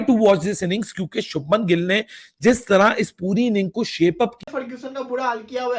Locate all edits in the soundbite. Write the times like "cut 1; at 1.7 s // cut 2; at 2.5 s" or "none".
cut 1; at 4.4 s